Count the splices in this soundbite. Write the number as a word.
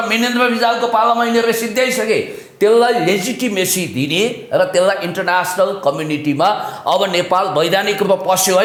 zero